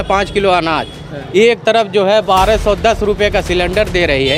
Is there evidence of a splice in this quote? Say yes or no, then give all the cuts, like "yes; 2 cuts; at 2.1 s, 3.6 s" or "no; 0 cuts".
no; 0 cuts